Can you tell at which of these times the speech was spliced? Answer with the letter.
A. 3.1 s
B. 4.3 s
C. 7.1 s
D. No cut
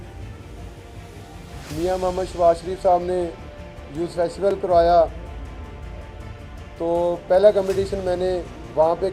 B